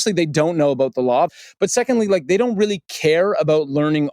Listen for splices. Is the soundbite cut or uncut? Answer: cut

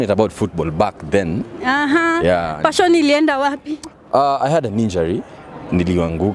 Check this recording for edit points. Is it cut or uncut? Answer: uncut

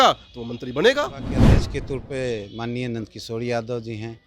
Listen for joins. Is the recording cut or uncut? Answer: cut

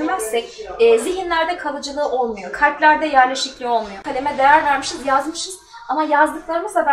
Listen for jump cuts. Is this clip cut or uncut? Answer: cut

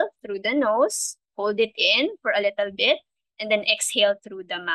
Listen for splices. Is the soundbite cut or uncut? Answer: uncut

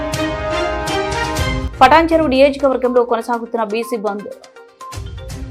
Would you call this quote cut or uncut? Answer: cut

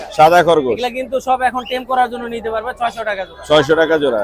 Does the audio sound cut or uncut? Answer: uncut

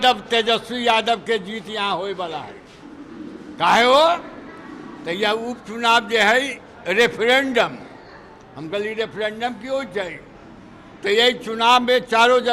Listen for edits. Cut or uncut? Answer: uncut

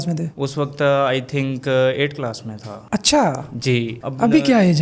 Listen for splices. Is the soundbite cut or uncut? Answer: uncut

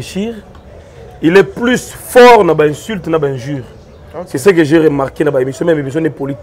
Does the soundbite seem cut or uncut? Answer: uncut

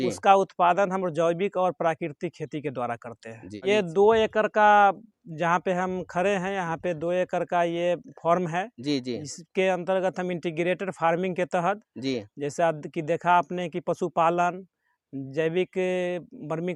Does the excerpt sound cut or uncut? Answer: uncut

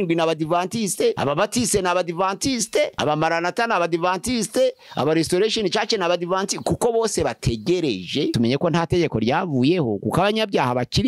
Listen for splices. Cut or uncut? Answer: cut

